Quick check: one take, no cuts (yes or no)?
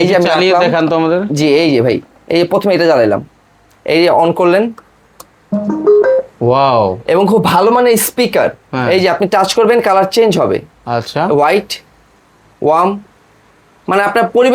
yes